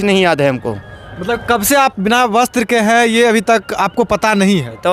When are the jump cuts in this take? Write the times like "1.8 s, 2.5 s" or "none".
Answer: none